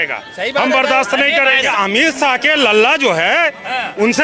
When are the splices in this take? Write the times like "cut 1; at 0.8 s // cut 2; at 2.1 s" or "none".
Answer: cut 1; at 1.7 s

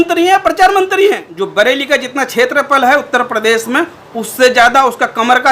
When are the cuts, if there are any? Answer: cut 1; at 1.3 s

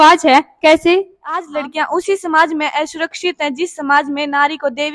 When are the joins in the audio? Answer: cut 1; at 1.5 s

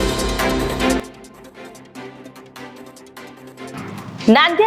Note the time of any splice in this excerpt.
cut 1; at 1.0 s // cut 2; at 3.2 s

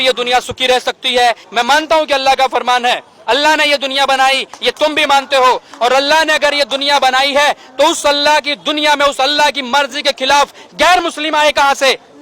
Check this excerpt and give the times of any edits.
cut 1; at 1.4 s

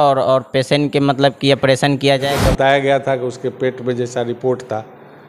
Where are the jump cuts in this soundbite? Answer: cut 1; at 2.2 s

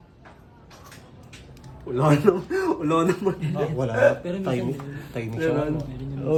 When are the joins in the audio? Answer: none

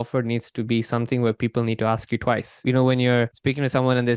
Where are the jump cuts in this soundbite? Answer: cut 1; at 2.6 s // cut 2; at 3.4 s

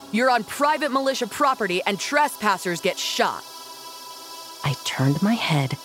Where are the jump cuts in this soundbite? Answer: cut 1; at 4.1 s

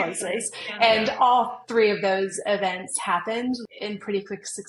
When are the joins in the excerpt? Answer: cut 1; at 3.6 s

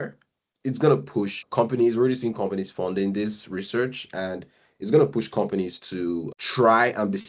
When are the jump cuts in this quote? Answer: cut 1; at 1.4 s // cut 2; at 6.3 s

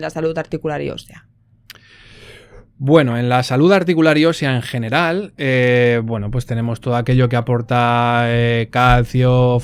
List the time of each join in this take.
none

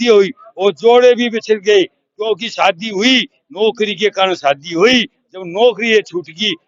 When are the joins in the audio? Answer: none

